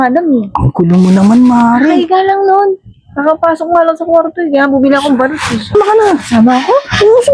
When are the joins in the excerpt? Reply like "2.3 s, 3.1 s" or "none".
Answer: 5.7 s